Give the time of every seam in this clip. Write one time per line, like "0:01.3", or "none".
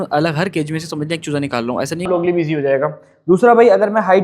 0:02.1